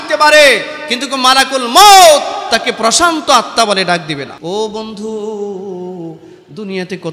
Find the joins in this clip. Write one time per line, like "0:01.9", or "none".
0:04.3